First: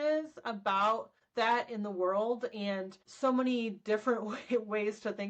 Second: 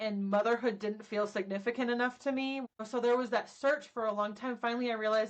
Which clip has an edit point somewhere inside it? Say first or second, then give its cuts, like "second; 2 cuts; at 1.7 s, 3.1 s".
second; 1 cut; at 2.6 s